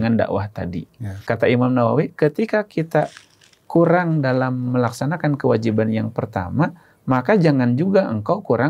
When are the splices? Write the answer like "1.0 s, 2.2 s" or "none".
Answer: 1.2 s